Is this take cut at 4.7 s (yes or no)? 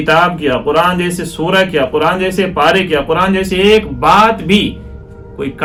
no